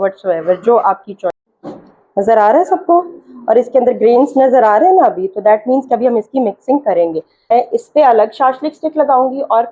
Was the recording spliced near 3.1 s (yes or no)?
no